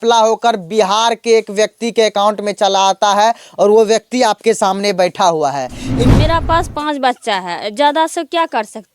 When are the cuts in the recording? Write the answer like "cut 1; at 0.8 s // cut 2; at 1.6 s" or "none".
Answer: cut 1; at 6.0 s